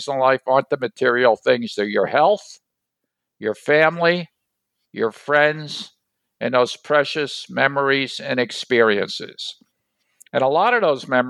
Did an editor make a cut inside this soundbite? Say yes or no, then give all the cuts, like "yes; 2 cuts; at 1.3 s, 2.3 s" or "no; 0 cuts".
no; 0 cuts